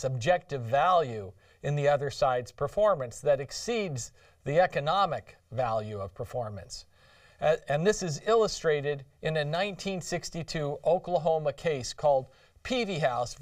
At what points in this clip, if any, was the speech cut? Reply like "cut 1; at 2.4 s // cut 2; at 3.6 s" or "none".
cut 1; at 3.4 s